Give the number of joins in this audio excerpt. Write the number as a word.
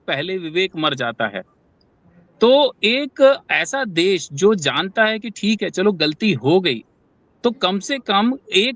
zero